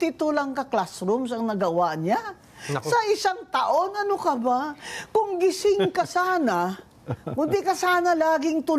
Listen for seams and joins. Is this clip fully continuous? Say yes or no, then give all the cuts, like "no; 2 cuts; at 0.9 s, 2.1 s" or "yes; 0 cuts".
yes; 0 cuts